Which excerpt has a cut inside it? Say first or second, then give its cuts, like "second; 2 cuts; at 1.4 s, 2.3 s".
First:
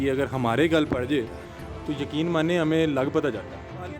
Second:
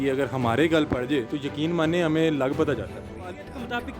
second; 1 cut; at 1.4 s